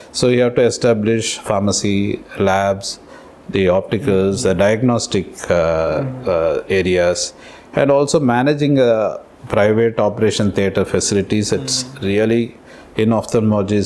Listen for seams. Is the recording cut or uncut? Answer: uncut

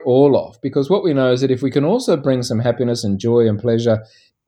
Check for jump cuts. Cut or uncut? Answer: uncut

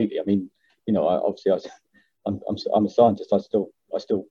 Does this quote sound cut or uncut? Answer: uncut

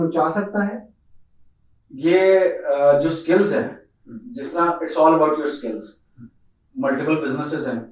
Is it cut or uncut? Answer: uncut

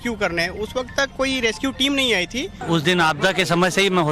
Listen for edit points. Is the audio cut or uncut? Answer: cut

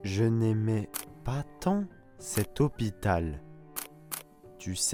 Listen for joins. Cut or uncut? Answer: uncut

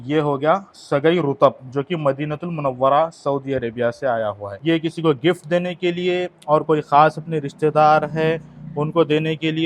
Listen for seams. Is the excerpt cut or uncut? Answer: cut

